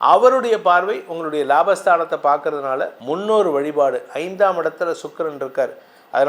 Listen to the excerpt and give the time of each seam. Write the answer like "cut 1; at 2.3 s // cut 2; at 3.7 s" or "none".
cut 1; at 3.0 s